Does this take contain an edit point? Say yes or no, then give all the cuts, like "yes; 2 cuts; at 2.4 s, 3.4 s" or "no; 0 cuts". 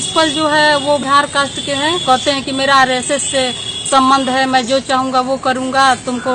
yes; 1 cut; at 1.0 s